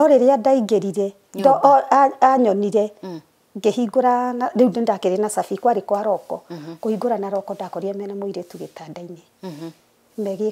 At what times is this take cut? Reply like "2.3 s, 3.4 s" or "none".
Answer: none